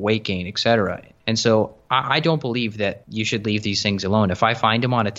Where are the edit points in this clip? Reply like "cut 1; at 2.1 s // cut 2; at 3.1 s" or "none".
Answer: cut 1; at 1.1 s // cut 2; at 3.0 s